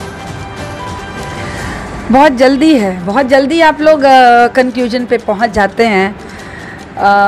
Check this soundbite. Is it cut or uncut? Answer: uncut